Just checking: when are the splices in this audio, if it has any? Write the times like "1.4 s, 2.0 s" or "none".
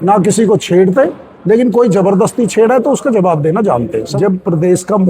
4.1 s

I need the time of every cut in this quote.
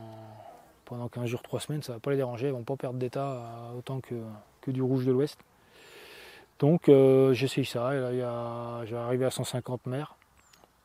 none

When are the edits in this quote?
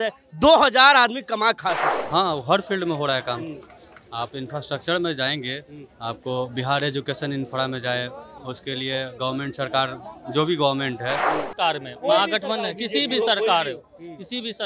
1.9 s, 11.4 s

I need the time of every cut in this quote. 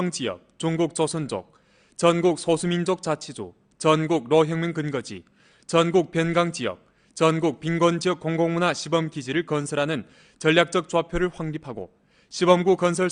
10.2 s

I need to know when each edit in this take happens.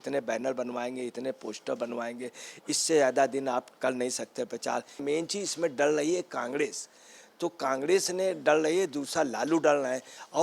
5.0 s

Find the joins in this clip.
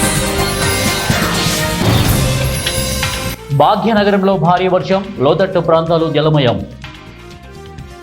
3.4 s, 6.8 s

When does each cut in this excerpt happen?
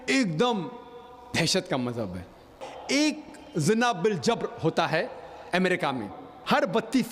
2.7 s

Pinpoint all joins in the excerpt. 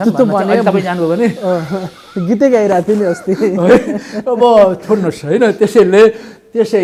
none

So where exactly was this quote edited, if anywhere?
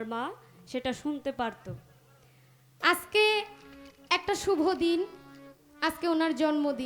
2.8 s

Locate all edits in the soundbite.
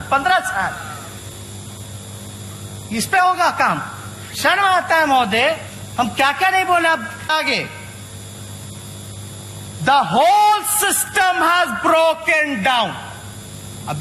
7.3 s

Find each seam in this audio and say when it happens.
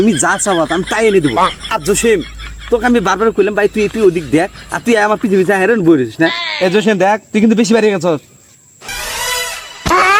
none

